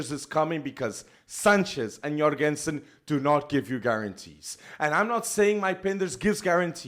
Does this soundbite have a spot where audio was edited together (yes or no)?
no